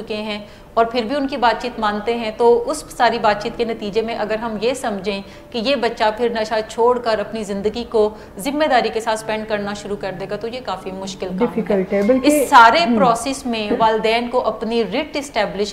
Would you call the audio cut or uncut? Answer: uncut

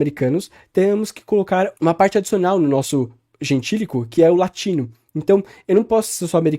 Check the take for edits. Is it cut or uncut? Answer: uncut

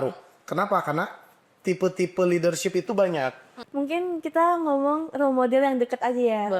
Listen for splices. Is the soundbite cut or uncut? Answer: cut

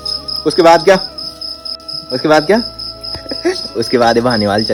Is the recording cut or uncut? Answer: uncut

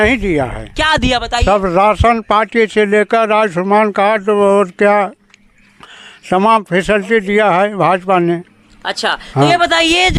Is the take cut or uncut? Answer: uncut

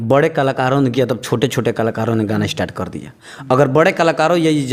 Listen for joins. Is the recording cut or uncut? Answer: uncut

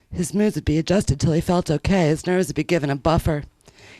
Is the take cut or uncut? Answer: uncut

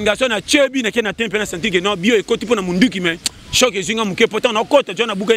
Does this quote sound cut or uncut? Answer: uncut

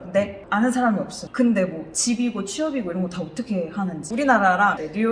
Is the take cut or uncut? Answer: cut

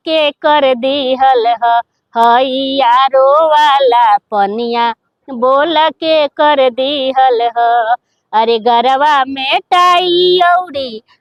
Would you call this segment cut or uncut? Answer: uncut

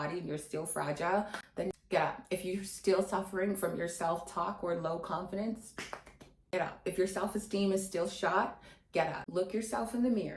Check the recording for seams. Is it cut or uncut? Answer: cut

